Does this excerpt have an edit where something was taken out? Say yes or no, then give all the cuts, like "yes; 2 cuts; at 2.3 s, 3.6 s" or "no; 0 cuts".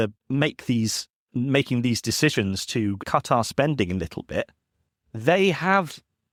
no; 0 cuts